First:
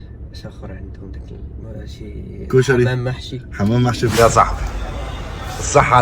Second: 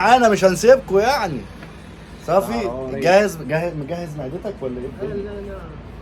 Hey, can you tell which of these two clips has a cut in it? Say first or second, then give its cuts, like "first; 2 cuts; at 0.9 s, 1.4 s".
first; 1 cut; at 4.1 s